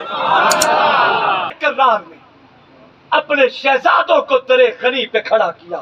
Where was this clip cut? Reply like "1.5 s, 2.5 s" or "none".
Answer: 1.6 s